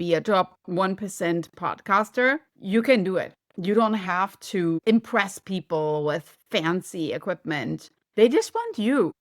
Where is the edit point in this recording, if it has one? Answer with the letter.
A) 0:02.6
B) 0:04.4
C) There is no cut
C